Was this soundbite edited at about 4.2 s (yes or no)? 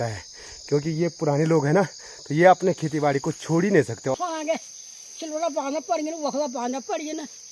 yes